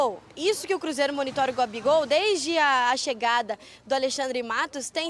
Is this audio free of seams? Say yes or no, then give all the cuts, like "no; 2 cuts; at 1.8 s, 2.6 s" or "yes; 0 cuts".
yes; 0 cuts